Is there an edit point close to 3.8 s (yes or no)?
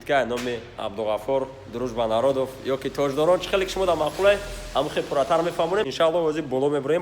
no